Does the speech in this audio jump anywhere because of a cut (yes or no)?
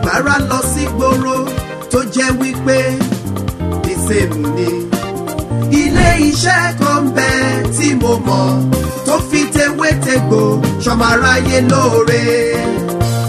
no